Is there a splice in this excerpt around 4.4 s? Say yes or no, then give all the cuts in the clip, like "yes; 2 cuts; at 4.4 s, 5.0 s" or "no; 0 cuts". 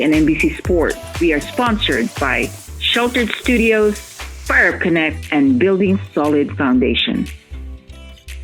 no; 2 cuts; at 1.0 s, 7.3 s